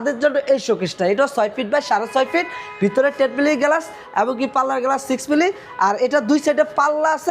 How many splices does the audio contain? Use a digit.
0